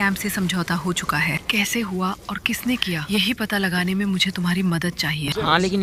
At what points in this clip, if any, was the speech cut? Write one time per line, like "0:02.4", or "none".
none